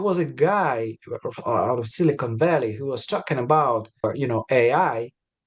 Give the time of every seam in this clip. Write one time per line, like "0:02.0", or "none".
0:04.0